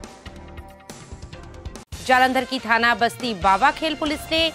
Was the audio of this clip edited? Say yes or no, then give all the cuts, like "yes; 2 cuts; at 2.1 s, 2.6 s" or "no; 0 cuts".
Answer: yes; 1 cut; at 1.8 s